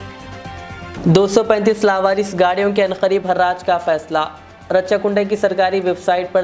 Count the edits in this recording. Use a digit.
1